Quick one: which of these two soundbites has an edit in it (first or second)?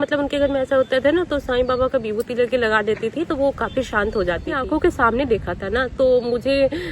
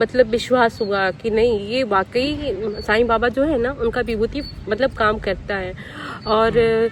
first